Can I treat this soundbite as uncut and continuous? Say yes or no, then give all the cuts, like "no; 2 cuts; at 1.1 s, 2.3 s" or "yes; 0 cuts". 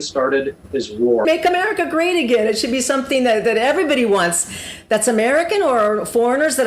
no; 1 cut; at 1.2 s